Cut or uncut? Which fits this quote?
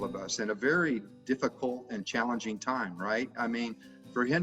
uncut